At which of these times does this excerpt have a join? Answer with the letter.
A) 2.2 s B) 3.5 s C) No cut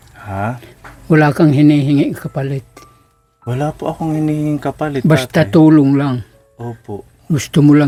C